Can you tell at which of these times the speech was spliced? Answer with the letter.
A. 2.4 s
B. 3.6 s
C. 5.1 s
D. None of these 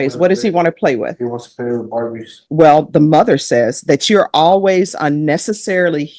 A